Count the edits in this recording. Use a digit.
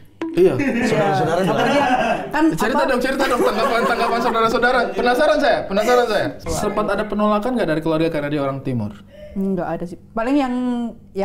1